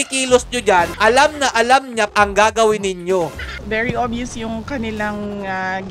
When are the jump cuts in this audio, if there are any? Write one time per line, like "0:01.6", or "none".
0:00.9
0:02.1
0:03.5